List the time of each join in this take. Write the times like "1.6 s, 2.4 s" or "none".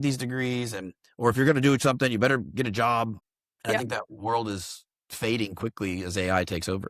3.3 s